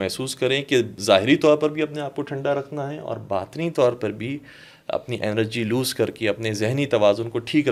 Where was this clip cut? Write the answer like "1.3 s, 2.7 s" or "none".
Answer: none